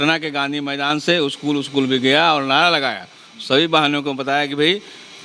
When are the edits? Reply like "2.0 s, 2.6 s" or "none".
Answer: none

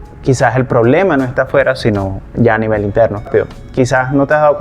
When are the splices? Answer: 3.3 s

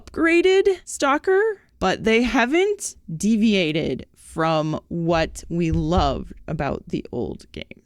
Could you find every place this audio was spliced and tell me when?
0.9 s, 1.7 s

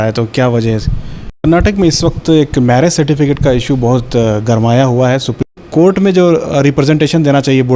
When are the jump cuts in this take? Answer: 1.4 s, 5.5 s

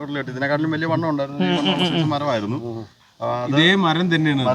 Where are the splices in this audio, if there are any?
none

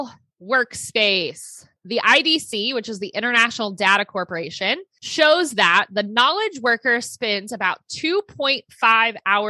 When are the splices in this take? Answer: 1.8 s, 5.0 s

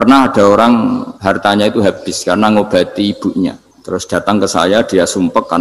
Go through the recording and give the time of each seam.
1.1 s, 3.7 s

